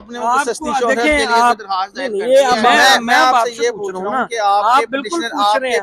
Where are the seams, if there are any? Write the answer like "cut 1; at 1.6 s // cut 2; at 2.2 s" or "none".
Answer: cut 1; at 2.8 s

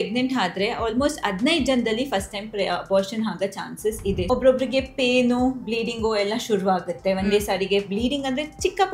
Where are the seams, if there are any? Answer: cut 1; at 4.3 s

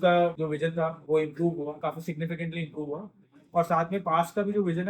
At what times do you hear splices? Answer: cut 1; at 0.7 s // cut 2; at 1.8 s

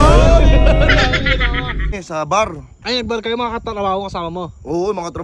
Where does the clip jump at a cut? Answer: cut 1; at 2.0 s

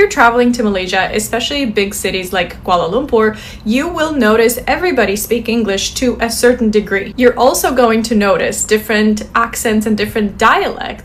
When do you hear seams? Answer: none

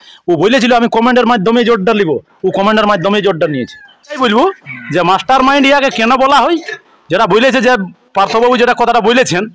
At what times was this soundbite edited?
cut 1; at 4.2 s

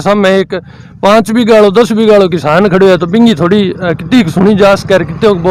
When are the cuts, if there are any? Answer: none

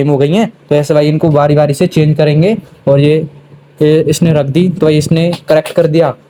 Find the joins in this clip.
none

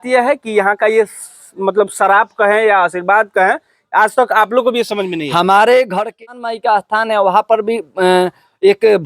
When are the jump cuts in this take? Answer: cut 1; at 6.2 s

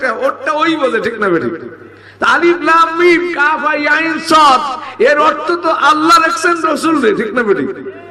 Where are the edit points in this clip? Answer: none

